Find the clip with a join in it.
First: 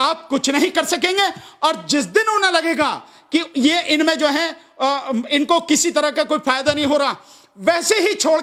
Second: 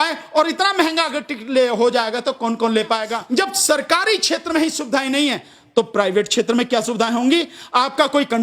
second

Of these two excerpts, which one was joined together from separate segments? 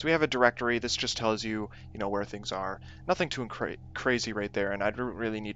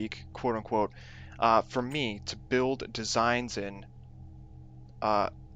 second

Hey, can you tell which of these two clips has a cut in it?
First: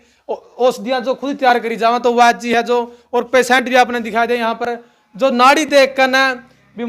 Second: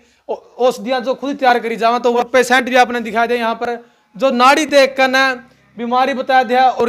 second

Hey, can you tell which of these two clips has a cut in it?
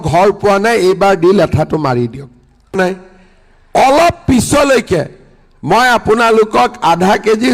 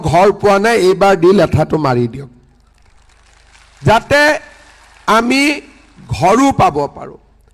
first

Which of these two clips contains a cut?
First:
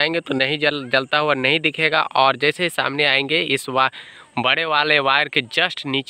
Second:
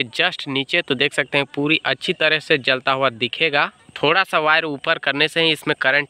second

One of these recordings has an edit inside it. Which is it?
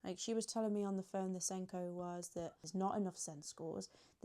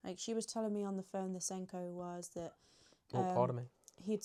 first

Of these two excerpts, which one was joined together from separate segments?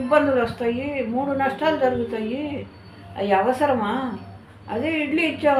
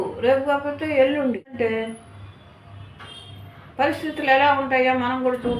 second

